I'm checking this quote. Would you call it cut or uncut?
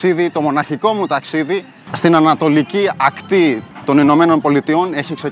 uncut